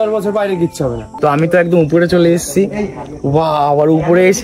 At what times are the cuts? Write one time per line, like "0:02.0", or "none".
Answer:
0:01.1